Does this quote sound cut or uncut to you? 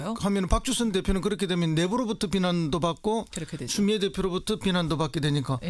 uncut